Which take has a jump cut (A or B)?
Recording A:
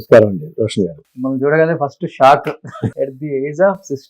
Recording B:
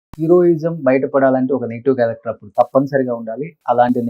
A